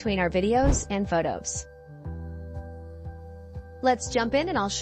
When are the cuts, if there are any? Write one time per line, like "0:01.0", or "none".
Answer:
0:01.4
0:03.8